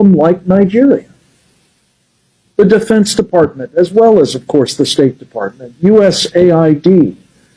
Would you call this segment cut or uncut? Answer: uncut